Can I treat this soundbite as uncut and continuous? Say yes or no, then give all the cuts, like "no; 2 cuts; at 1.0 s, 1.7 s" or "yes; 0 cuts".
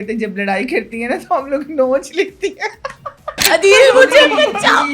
no; 1 cut; at 3.3 s